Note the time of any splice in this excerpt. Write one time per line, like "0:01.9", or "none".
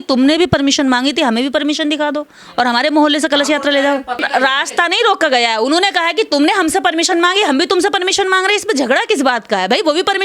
0:04.2